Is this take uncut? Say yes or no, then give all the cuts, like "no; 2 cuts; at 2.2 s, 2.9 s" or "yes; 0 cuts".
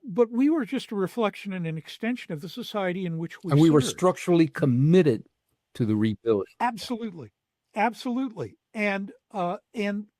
yes; 0 cuts